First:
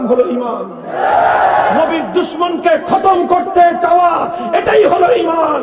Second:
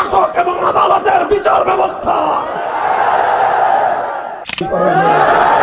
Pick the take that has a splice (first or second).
second